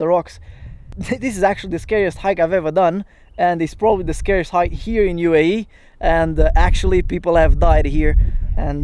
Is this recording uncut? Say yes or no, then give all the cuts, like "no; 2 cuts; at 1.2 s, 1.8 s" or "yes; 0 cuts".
no; 1 cut; at 0.9 s